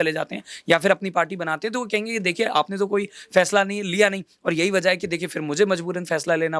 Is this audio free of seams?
yes; 0 cuts

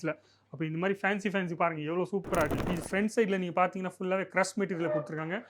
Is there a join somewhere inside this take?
yes; 1 cut; at 2.6 s

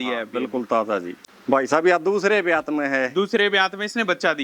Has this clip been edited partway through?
yes; 1 cut; at 1.2 s

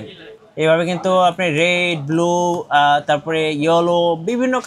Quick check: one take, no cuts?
yes; 0 cuts

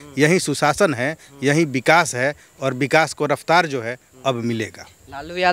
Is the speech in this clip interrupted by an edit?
no; 0 cuts

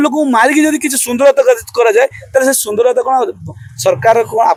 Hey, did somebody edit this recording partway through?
no; 0 cuts

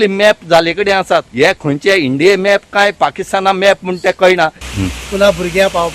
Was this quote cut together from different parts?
yes; 2 cuts; at 1.5 s, 4.7 s

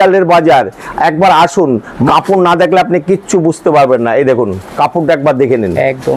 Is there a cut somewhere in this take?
yes; 1 cut; at 2.1 s

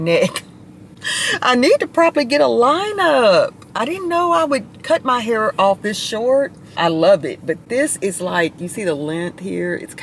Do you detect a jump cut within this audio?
no; 0 cuts

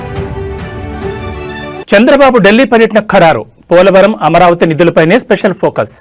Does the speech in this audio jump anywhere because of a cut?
yes; 1 cut; at 1.2 s

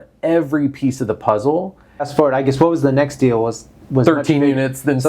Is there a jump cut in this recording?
yes; 1 cut; at 2.1 s

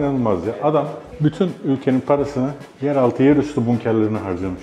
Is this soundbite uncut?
no; 2 cuts; at 1.0 s, 2.6 s

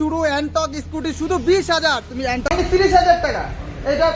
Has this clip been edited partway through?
yes; 1 cut; at 2.5 s

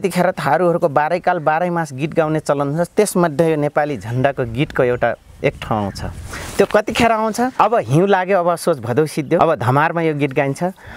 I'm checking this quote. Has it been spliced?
yes; 2 cuts; at 7.5 s, 9.4 s

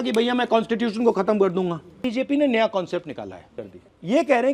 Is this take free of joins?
no; 2 cuts; at 2.0 s, 3.6 s

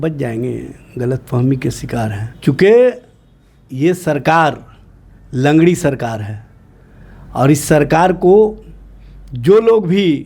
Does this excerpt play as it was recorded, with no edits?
no; 1 cut; at 2.3 s

